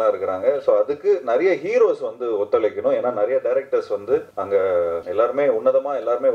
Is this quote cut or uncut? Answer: cut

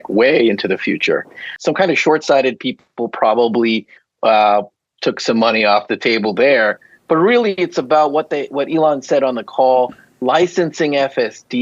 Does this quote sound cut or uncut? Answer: cut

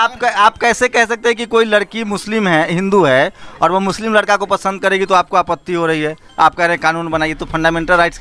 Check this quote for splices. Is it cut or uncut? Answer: uncut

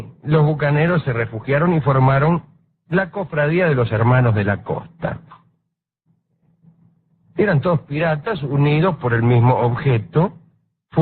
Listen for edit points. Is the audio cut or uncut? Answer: cut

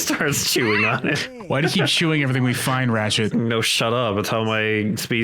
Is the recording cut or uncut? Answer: cut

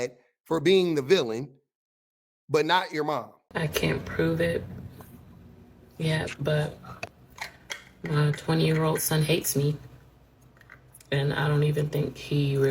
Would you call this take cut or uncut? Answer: cut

